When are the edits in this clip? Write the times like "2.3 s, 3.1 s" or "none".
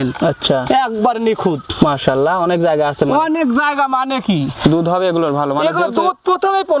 none